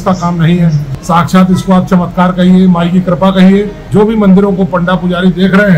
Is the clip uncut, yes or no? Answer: no